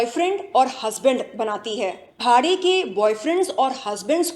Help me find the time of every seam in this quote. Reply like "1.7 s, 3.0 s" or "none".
2.0 s